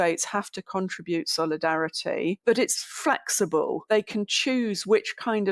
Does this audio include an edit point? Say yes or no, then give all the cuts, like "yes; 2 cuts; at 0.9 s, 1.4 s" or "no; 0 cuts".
yes; 2 cuts; at 2.4 s, 3.9 s